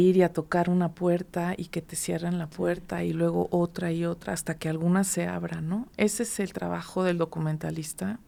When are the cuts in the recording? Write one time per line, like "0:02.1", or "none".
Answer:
none